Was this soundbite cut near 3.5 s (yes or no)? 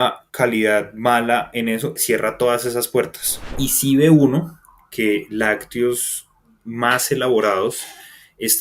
yes